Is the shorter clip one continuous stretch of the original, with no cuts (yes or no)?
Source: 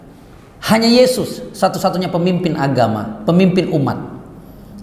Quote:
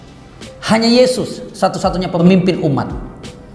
no